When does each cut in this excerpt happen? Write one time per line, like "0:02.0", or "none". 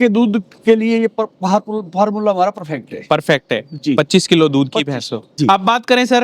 0:05.3